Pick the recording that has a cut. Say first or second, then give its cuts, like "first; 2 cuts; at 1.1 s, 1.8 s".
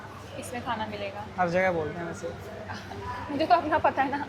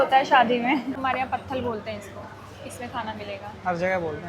second; 1 cut; at 0.9 s